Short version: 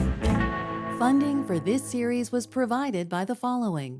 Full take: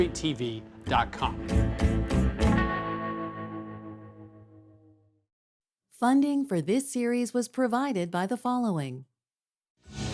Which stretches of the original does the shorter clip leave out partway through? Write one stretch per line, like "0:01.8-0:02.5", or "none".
0:03.1-0:06.0